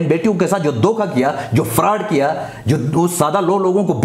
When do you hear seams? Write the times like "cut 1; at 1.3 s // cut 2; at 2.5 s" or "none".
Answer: none